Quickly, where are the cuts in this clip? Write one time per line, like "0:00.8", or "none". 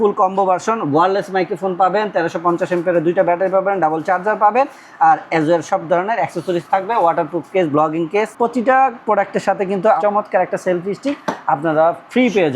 0:08.3
0:10.0